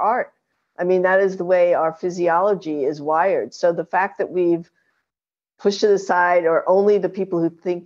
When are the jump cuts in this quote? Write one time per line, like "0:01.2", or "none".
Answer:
none

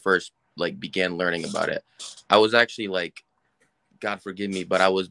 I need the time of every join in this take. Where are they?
none

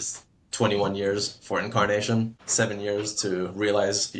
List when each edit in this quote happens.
0:02.4

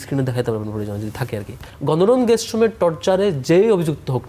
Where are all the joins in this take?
0:01.6

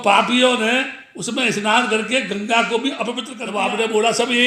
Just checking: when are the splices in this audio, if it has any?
0:03.3

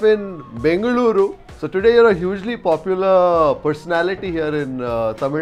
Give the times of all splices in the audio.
0:01.5

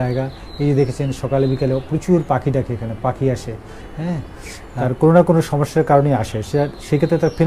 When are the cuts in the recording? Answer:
0:04.7

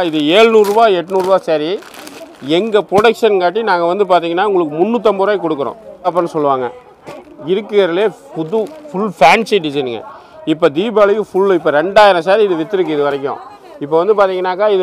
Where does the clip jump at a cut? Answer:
0:06.1

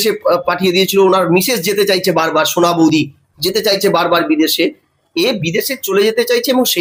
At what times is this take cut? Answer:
none

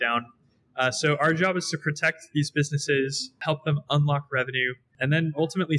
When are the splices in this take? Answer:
0:03.4
0:04.9

